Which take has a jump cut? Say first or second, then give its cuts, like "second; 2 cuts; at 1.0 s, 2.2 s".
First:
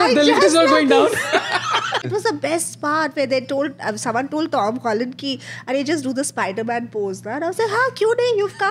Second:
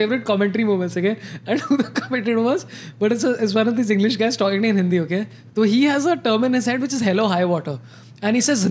first; 1 cut; at 2.0 s